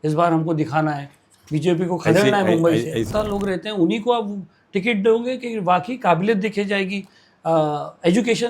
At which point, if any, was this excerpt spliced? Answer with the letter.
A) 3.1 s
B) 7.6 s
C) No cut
A